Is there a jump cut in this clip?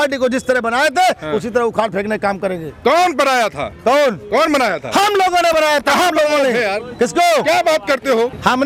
no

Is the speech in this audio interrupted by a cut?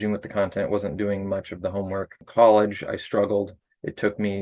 yes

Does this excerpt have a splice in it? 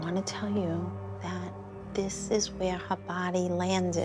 yes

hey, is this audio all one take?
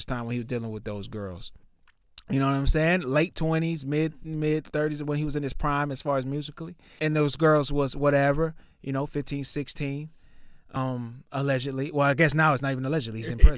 no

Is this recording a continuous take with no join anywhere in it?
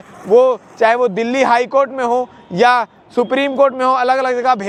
yes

